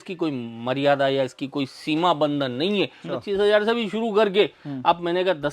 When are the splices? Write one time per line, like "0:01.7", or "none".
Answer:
0:03.0

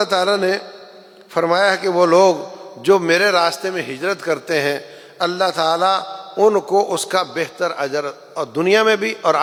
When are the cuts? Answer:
none

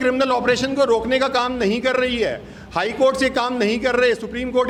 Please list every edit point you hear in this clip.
none

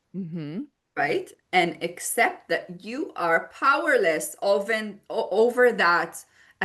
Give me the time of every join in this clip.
none

